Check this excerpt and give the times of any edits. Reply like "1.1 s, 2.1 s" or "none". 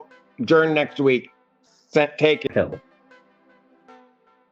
2.5 s